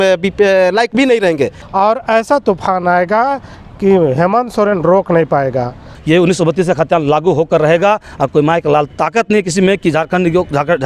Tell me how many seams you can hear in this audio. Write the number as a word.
two